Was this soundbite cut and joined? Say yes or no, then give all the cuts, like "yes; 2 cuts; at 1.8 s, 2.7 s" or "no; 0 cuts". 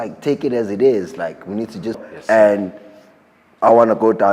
yes; 1 cut; at 2.0 s